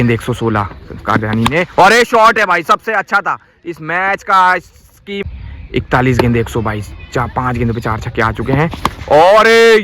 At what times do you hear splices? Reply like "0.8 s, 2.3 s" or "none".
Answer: 5.2 s